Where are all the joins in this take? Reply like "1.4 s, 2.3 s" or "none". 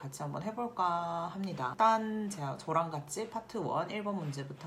1.7 s